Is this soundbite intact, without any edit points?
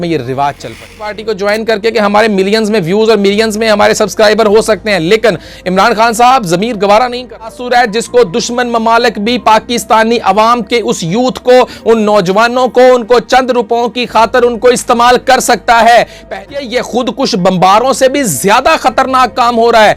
no; 3 cuts; at 1.2 s, 7.5 s, 16.3 s

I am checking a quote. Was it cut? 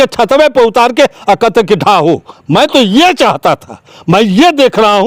no; 0 cuts

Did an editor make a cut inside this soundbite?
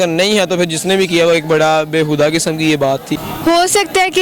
yes; 1 cut; at 3.0 s

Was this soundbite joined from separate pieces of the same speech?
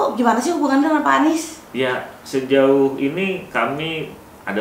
no; 0 cuts

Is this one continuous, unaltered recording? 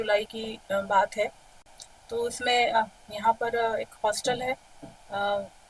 no; 1 cut; at 1.4 s

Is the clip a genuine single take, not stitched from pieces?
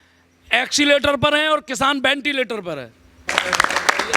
no; 1 cut; at 3.1 s

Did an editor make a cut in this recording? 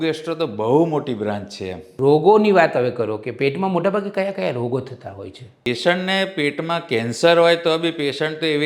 yes; 2 cuts; at 1.8 s, 5.7 s

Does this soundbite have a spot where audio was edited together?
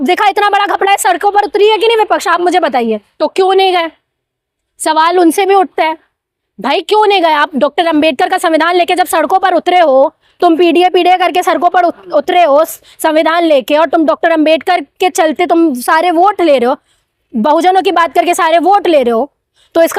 yes; 1 cut; at 3.1 s

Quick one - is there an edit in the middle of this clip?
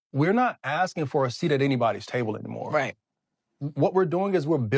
yes; 1 cut; at 3.6 s

